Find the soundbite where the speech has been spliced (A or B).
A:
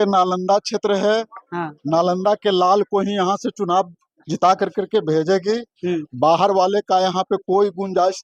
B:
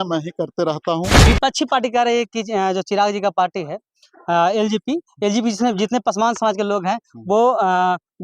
B